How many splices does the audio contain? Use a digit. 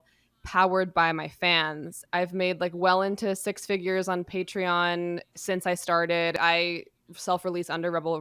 2